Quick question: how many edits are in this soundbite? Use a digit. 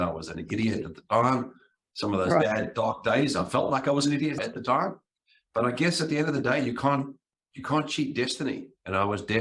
1